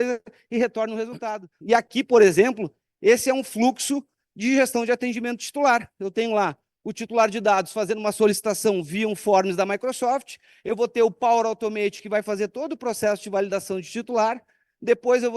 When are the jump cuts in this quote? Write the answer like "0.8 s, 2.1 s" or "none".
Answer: 1.2 s